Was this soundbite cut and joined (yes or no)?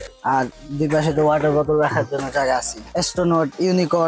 yes